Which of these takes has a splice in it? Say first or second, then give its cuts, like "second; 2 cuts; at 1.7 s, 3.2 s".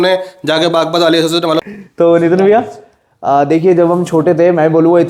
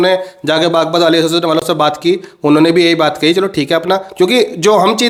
first; 1 cut; at 1.7 s